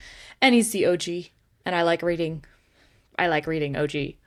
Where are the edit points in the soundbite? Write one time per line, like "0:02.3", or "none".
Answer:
none